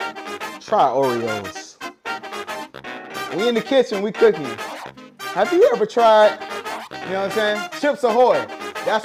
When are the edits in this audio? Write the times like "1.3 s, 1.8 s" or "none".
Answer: none